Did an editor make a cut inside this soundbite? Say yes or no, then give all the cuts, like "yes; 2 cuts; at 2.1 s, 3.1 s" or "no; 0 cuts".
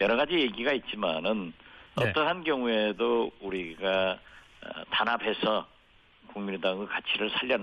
yes; 1 cut; at 2.9 s